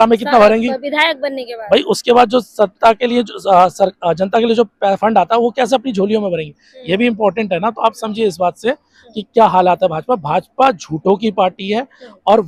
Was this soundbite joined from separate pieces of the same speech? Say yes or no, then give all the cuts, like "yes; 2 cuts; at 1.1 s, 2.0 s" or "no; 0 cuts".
no; 0 cuts